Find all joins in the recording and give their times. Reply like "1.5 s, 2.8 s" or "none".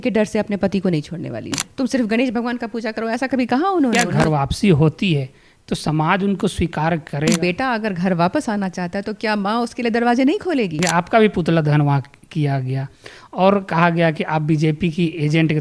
1.7 s, 4.0 s, 7.3 s, 10.8 s